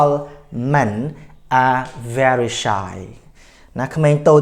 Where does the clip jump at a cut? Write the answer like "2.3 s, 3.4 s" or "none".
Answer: none